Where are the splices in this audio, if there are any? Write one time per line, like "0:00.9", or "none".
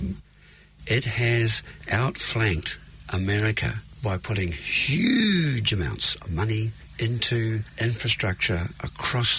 0:01.8
0:03.9
0:06.8
0:07.7

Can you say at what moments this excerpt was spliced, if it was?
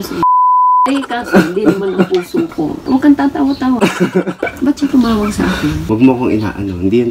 0:00.9
0:02.8
0:05.8

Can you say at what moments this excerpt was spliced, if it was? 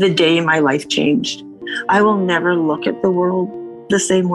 none

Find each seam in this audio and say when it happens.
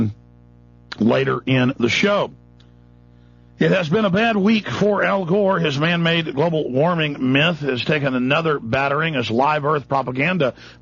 0:01.1

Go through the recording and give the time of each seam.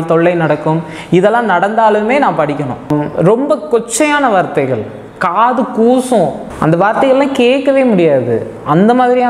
0:03.2
0:06.5

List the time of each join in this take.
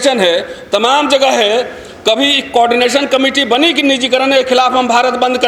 none

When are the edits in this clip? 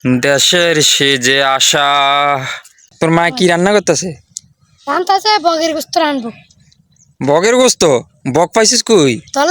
0:02.9

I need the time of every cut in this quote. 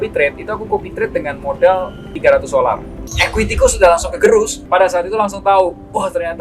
0:02.0
0:03.0

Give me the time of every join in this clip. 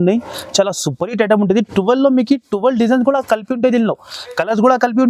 none

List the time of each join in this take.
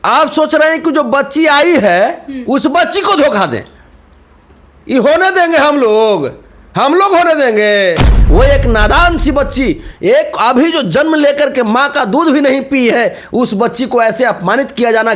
0:08.1

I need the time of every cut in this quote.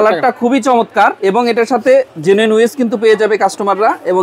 0:01.2

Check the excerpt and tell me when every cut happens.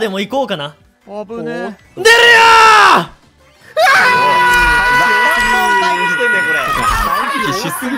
none

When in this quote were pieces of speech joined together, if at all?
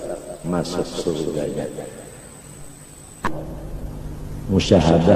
0:03.2

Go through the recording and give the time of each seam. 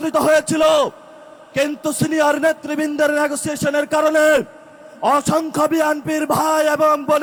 none

